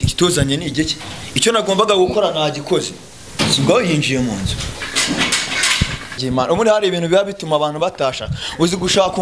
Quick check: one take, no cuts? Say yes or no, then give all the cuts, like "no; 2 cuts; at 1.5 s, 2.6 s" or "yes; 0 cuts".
no; 1 cut; at 6.2 s